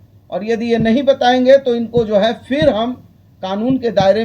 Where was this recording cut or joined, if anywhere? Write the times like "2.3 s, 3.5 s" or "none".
none